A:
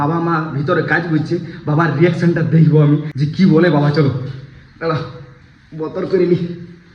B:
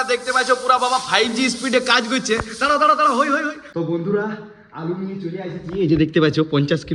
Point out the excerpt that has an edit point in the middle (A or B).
B